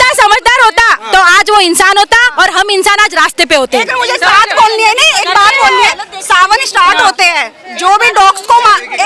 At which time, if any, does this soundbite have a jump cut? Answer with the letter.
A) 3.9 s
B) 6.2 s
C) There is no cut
C